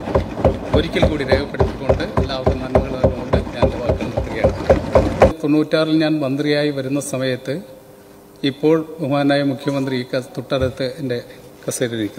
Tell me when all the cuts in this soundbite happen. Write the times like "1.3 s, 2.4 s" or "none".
5.5 s